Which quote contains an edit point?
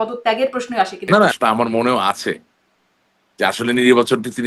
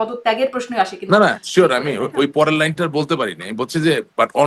first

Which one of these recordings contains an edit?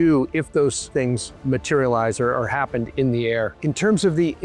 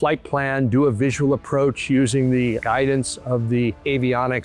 first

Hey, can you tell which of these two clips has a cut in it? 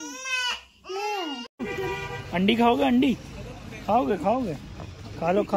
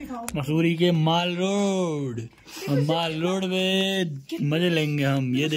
first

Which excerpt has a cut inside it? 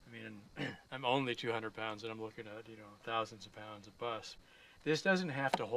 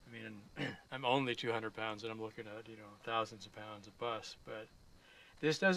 first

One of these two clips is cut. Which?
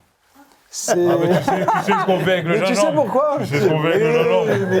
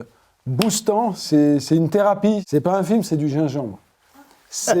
second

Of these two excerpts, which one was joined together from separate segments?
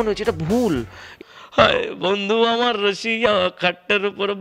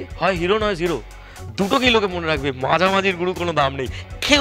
first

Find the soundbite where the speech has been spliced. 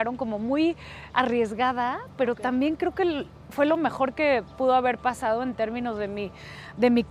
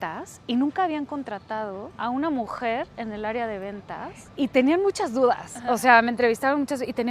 second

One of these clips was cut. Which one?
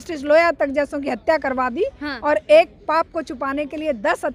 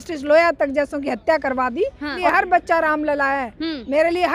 second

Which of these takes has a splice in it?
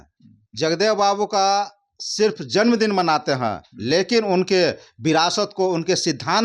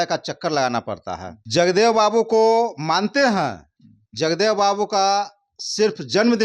second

